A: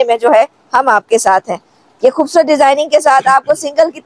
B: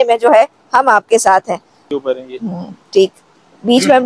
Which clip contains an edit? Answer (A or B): B